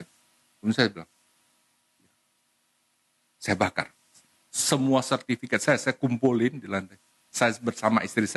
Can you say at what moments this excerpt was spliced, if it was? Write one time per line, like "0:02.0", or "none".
none